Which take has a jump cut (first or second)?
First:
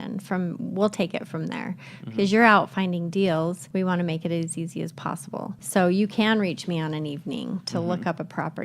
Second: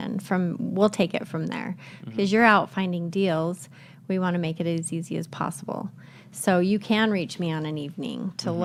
first